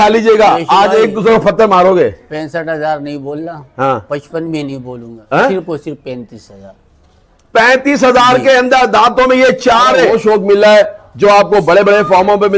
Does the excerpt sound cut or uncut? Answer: cut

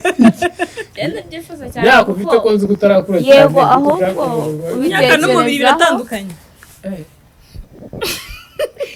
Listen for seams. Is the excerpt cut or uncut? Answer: uncut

